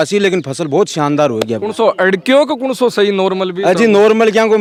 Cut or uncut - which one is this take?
uncut